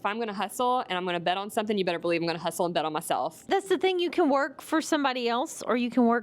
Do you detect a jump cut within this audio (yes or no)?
yes